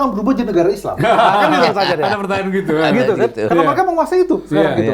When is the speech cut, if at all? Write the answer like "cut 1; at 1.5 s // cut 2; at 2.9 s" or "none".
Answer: none